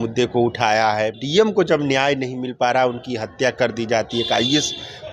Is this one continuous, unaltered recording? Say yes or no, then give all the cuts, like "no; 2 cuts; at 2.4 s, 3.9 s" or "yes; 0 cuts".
no; 1 cut; at 1.2 s